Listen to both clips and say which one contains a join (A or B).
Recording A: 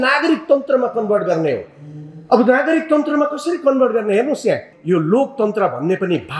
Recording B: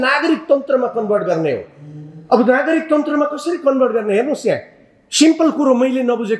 A